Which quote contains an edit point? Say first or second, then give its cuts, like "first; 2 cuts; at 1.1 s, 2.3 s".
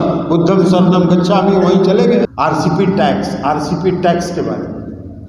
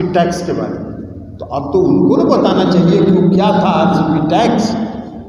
first; 1 cut; at 2.3 s